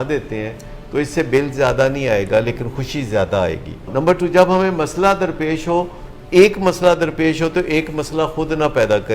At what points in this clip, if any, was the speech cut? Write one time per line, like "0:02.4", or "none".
0:03.9